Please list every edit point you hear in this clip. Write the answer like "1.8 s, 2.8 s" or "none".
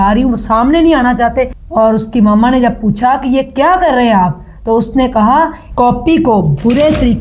1.6 s, 5.6 s